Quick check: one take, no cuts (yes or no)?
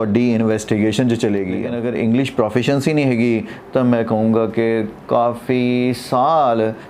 no